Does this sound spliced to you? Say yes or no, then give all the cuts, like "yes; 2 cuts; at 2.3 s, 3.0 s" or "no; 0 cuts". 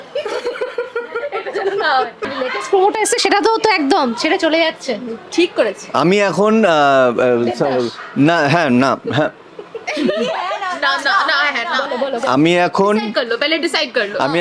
yes; 1 cut; at 2.3 s